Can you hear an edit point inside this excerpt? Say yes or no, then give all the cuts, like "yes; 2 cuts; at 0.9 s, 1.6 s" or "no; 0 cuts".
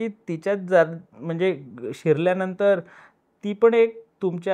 no; 0 cuts